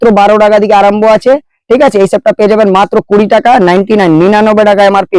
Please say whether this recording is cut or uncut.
uncut